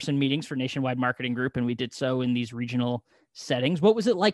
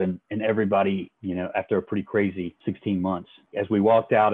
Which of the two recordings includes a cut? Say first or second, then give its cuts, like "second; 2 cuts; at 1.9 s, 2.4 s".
second; 3 cuts; at 1.1 s, 2.5 s, 3.5 s